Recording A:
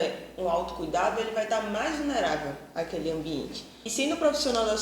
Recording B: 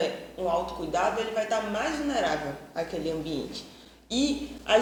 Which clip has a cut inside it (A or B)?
A